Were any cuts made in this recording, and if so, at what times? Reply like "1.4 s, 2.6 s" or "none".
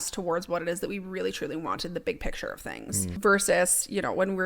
3.2 s